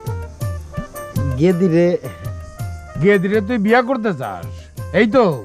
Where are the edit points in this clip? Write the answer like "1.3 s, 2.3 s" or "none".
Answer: none